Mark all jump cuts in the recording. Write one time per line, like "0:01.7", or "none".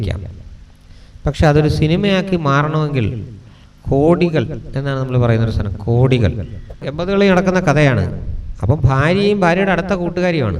0:06.8